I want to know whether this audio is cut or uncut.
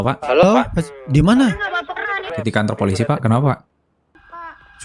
cut